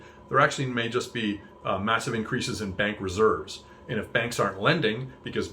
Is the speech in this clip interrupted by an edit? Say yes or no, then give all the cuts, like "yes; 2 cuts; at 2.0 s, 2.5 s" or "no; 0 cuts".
no; 0 cuts